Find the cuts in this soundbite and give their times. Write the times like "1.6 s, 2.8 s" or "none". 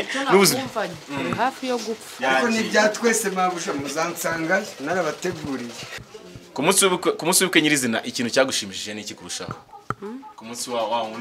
5.9 s